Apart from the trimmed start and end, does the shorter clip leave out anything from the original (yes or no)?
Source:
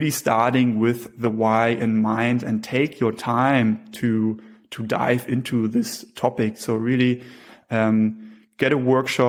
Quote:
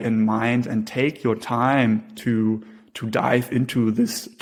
no